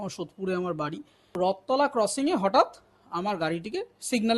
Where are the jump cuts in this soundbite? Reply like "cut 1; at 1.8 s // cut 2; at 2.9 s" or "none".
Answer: cut 1; at 1.4 s